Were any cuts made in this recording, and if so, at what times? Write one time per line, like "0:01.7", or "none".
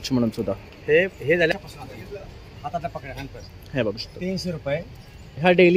0:01.5